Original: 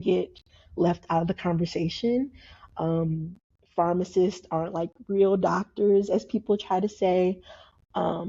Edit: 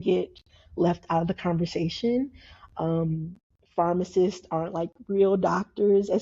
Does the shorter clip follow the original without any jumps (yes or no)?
yes